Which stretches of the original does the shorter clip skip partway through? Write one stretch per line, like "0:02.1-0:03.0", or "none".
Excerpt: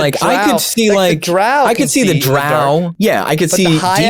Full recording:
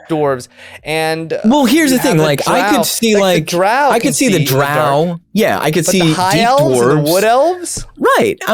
0:05.2-0:05.3